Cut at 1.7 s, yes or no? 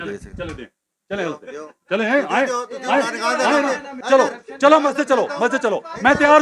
no